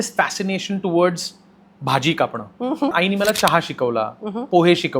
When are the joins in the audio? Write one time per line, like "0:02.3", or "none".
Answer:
0:02.9